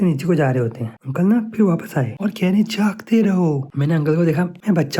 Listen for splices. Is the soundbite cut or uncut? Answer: cut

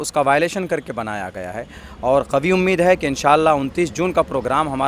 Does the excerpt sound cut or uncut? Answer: cut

